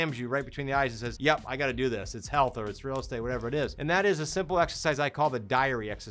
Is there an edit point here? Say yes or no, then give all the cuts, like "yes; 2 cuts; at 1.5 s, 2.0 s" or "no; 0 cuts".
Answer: yes; 2 cuts; at 1.1 s, 3.8 s